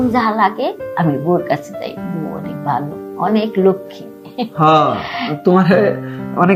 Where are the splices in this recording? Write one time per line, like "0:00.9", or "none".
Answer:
none